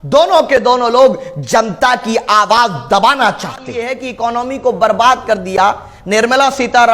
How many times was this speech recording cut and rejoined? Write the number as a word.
one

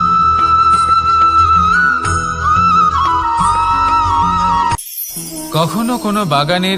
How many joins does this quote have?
one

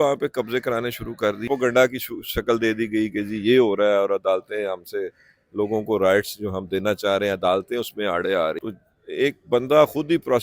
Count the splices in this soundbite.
two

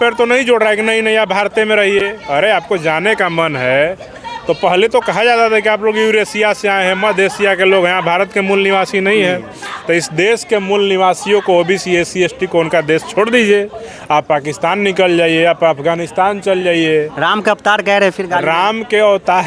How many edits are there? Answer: zero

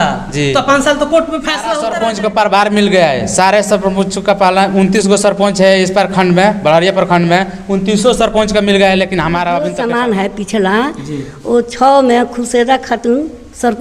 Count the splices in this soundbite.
two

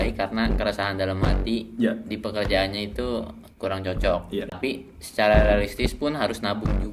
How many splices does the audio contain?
one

